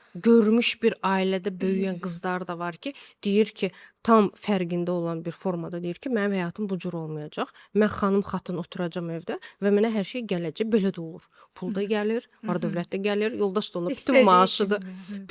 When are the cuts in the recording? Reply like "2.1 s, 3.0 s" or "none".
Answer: none